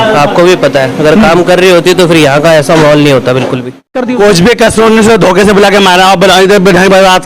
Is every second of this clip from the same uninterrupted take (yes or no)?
no